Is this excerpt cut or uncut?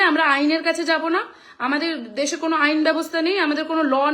uncut